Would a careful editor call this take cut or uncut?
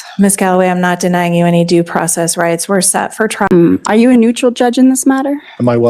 cut